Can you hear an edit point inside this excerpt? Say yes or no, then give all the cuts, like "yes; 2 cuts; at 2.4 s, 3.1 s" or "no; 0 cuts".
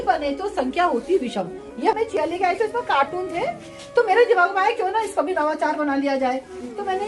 yes; 1 cut; at 1.9 s